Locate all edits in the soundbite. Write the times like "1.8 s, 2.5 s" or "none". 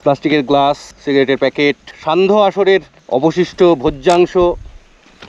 0.9 s, 1.9 s, 3.0 s